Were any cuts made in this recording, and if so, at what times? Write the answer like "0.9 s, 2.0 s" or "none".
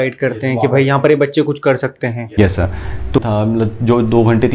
3.2 s